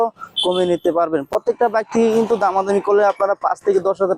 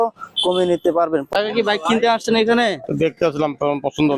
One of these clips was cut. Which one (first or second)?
second